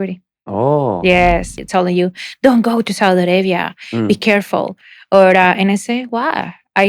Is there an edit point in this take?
yes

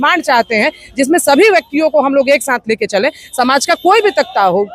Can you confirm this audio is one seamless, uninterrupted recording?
yes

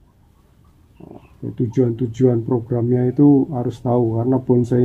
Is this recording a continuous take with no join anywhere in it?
no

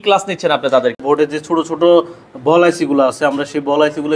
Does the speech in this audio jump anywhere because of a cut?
yes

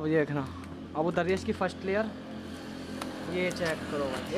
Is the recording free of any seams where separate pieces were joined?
yes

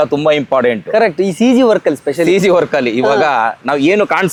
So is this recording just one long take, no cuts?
yes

